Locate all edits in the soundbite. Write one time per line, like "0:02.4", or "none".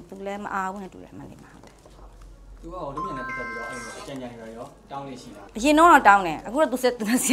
0:05.4